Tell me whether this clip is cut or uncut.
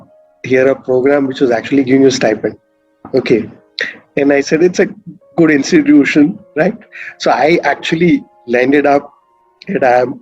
uncut